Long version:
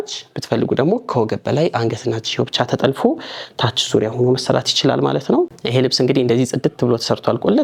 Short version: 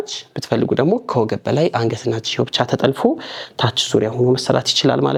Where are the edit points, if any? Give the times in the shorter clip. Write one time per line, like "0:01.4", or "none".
none